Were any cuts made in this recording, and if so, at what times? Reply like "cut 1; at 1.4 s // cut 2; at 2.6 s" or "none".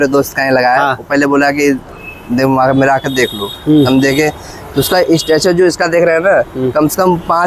none